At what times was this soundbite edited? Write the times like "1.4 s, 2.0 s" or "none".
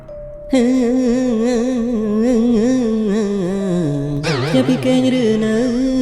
none